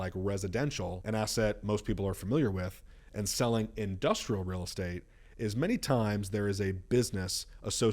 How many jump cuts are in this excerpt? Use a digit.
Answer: 1